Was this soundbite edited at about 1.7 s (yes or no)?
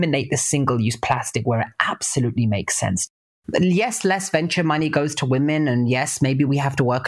no